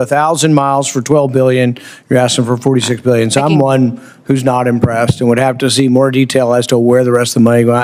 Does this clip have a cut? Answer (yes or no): no